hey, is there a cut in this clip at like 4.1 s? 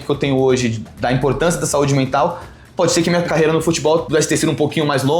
yes; 2 cuts; at 3.3 s, 4.1 s

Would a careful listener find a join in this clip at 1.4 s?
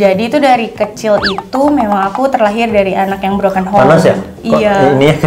no; 0 cuts

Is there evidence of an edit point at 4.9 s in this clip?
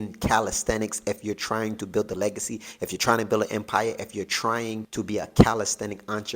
yes; 1 cut; at 4.9 s

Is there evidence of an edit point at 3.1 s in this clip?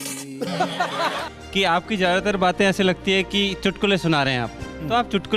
no; 1 cut; at 1.3 s

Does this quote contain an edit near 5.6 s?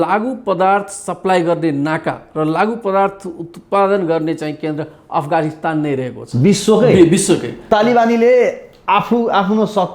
no; 1 cut; at 7.7 s

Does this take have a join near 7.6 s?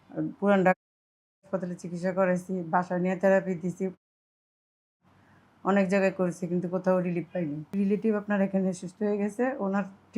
yes; 1 cut; at 7.6 s

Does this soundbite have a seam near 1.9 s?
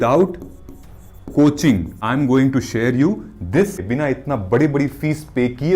yes; 2 cuts; at 1.9 s, 3.8 s

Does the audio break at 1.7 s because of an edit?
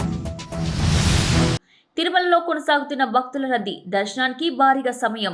no; 0 cuts

